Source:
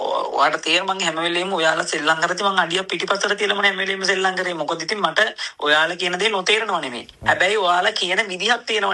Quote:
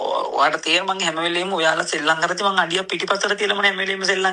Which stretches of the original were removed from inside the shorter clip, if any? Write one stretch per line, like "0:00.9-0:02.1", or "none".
none